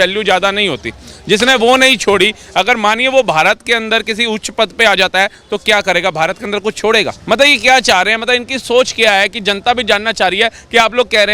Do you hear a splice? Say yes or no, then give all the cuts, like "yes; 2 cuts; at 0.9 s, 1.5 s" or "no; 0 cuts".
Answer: no; 0 cuts